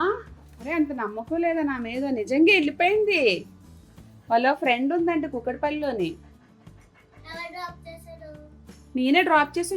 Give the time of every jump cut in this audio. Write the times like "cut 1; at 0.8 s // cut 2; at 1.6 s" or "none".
none